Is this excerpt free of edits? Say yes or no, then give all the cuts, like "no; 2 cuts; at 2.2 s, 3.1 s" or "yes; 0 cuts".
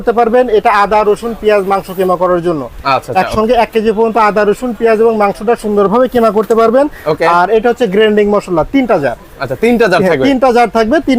yes; 0 cuts